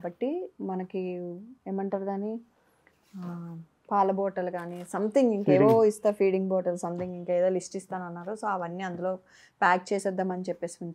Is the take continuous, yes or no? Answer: yes